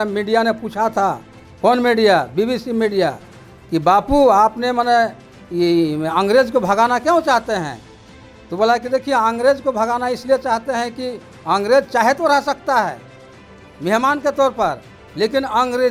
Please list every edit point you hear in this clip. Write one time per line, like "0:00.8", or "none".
none